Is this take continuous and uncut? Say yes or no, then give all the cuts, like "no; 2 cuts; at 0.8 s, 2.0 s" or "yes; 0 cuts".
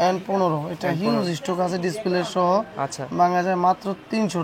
yes; 0 cuts